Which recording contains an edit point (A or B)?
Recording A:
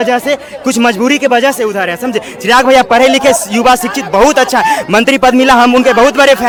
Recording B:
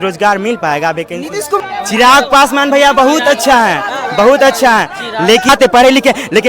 B